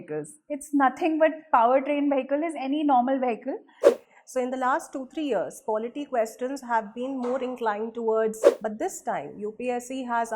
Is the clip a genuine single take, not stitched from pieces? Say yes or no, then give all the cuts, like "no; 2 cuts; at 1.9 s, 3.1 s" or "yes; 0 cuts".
no; 2 cuts; at 3.9 s, 8.5 s